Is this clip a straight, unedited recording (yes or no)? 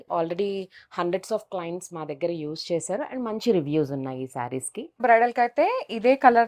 no